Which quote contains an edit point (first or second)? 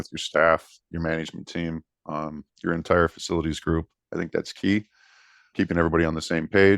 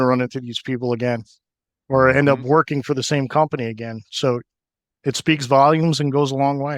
first